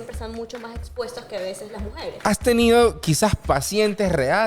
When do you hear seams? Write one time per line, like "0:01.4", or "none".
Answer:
0:02.2